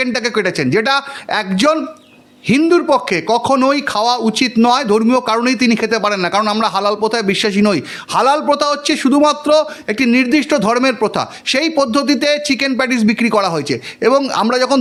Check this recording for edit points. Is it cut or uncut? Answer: uncut